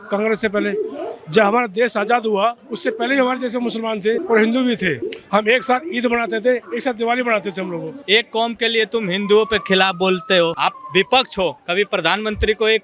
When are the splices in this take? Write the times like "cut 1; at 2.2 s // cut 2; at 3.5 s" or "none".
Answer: cut 1; at 2.7 s // cut 2; at 4.2 s // cut 3; at 5.1 s // cut 4; at 6.7 s // cut 5; at 7.9 s // cut 6; at 10.7 s // cut 7; at 11.6 s